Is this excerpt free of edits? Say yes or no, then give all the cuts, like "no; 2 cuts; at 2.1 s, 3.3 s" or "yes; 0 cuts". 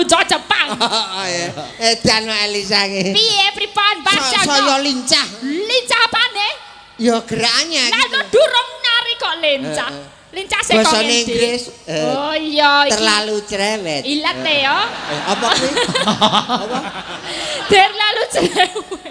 yes; 0 cuts